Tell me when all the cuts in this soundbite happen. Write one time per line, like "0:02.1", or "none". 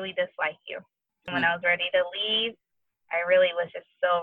0:01.3